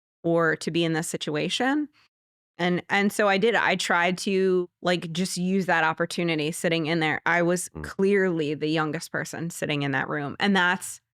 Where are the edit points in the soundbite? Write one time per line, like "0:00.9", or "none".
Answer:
0:04.6